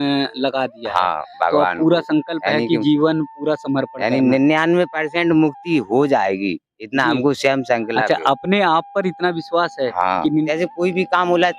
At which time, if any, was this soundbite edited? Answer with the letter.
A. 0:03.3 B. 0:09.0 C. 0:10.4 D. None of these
C